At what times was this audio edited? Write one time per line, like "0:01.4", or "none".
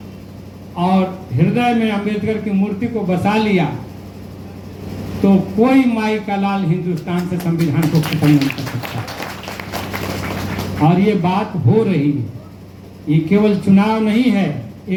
none